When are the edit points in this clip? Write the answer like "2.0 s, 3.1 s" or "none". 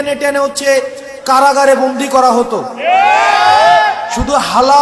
none